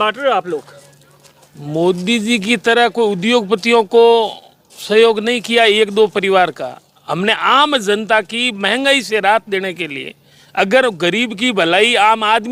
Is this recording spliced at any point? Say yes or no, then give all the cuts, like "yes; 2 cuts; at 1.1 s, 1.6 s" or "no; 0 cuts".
no; 0 cuts